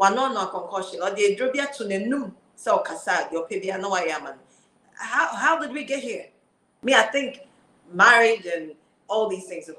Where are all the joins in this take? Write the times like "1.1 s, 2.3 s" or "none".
6.7 s